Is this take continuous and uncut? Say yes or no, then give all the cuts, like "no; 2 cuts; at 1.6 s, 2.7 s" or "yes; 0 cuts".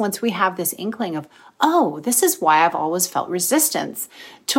yes; 0 cuts